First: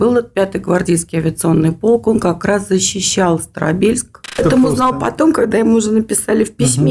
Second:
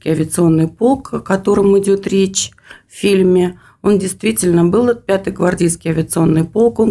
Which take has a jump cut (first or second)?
first